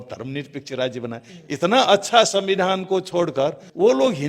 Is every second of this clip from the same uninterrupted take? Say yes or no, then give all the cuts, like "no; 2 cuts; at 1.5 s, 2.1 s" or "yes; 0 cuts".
no; 1 cut; at 1.3 s